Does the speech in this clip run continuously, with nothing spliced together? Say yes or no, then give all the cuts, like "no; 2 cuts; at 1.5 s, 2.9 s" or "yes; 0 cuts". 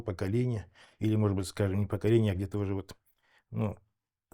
yes; 0 cuts